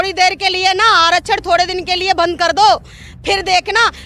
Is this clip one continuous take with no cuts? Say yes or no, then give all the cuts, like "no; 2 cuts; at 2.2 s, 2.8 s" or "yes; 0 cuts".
yes; 0 cuts